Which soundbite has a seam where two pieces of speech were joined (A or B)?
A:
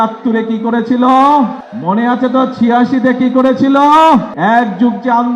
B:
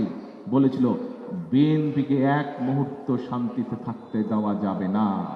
A